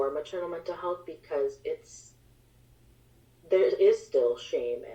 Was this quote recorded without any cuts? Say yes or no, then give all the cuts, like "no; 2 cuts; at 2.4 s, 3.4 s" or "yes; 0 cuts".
yes; 0 cuts